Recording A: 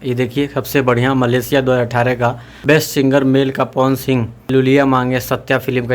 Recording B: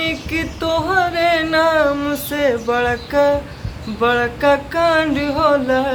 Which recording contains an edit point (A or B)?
A